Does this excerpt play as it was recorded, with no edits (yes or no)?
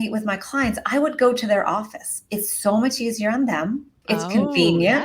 no